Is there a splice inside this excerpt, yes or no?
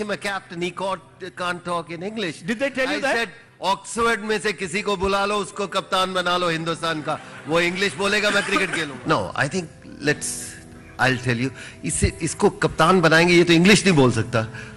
yes